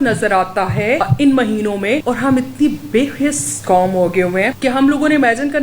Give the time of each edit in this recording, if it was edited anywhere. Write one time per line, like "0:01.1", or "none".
0:01.0
0:02.0
0:04.5